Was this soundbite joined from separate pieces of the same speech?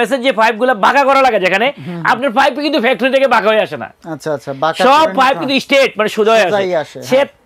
no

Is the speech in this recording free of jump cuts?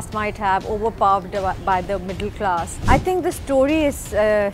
no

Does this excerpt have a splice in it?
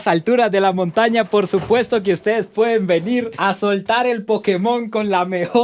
no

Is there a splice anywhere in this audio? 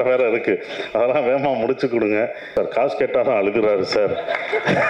yes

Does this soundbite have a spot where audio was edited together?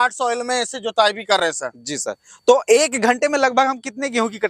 no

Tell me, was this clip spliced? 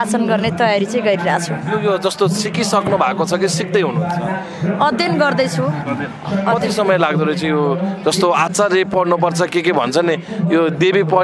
no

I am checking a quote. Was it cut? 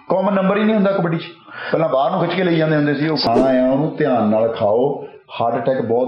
yes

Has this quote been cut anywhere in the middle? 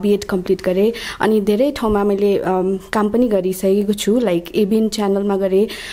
no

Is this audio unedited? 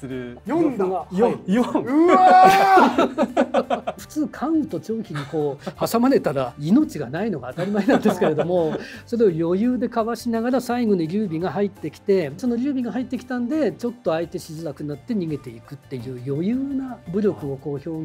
no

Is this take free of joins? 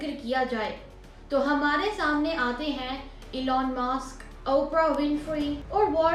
yes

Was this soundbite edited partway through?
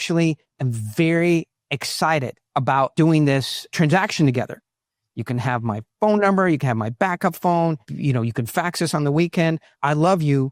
no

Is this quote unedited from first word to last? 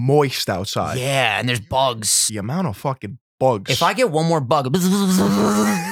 no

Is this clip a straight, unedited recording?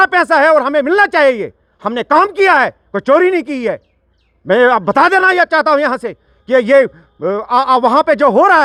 yes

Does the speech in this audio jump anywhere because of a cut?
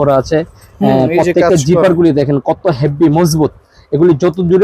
no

